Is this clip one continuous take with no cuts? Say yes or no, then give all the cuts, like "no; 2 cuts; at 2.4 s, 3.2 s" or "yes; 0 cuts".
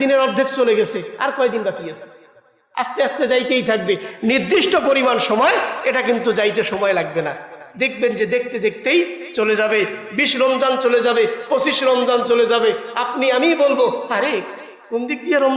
yes; 0 cuts